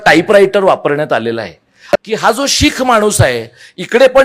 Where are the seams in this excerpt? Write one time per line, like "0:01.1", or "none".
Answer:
0:01.8

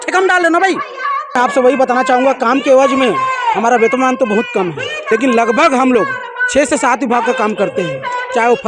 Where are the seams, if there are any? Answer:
0:01.4
0:05.0

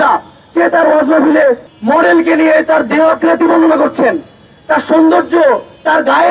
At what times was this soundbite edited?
0:01.7

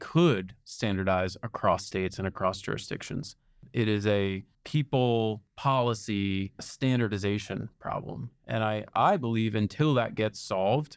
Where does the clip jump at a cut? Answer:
0:03.7
0:04.5
0:05.5
0:06.7

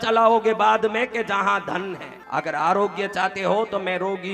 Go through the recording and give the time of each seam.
0:02.1

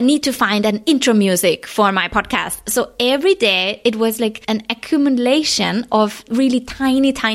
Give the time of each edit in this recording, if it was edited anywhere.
0:04.4
0:06.3

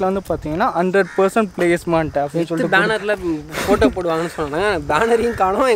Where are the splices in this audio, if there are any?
none

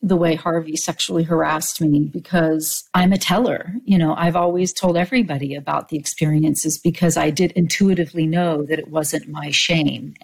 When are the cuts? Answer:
0:02.8

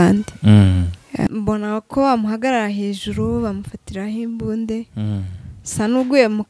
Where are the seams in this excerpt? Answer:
0:01.3

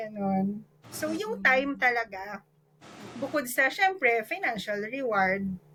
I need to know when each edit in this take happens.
none

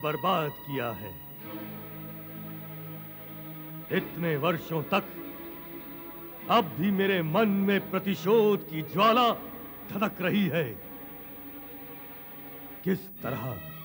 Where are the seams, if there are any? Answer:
none

